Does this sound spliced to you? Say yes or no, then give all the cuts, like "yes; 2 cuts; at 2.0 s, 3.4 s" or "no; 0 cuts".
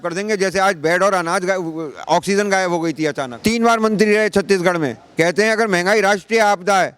yes; 1 cut; at 3.3 s